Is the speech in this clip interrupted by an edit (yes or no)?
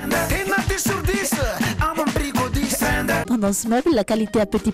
yes